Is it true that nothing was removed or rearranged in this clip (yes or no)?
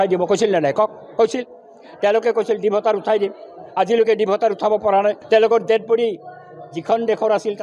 no